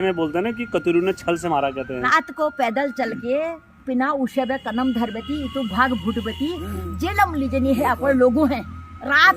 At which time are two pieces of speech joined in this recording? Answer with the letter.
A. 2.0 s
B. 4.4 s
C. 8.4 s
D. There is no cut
A